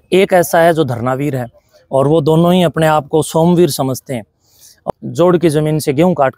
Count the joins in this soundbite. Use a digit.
1